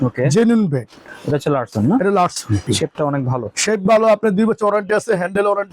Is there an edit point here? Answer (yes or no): yes